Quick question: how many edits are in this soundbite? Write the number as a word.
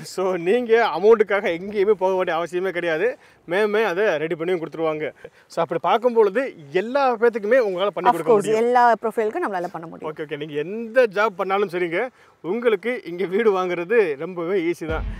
one